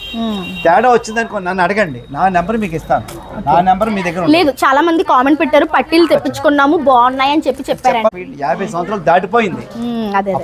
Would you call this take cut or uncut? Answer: uncut